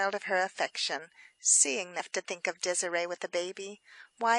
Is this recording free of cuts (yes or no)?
yes